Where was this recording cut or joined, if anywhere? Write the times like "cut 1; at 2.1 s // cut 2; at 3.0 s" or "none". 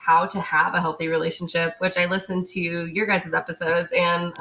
none